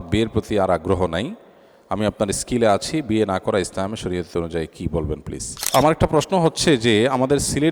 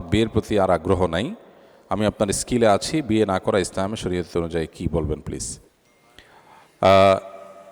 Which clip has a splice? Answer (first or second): first